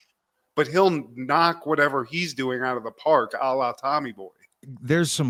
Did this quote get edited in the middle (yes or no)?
no